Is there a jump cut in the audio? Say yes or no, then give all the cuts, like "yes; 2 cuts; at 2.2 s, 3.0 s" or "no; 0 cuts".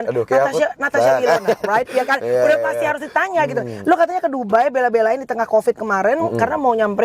no; 0 cuts